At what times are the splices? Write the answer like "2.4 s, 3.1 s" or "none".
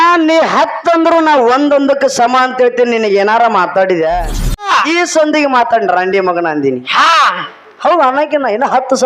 4.7 s